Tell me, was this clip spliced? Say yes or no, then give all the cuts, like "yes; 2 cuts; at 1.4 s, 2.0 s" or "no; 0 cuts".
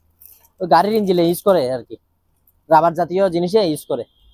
no; 0 cuts